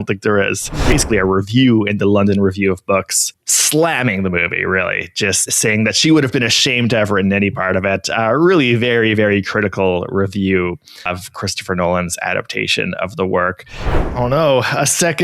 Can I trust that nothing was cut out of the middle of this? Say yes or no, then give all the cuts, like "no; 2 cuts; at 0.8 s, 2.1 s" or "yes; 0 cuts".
no; 2 cuts; at 0.9 s, 14.0 s